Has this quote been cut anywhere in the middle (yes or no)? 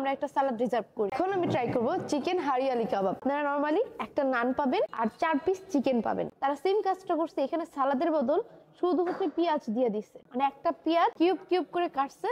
no